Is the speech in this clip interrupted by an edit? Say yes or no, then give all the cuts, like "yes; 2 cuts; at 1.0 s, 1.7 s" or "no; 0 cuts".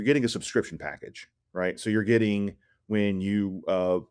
no; 0 cuts